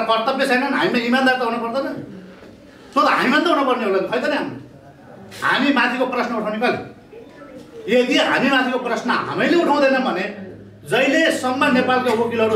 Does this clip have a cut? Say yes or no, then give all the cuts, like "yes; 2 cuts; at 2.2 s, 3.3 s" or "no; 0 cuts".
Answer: no; 0 cuts